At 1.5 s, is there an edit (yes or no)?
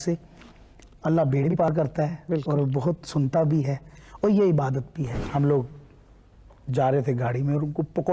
yes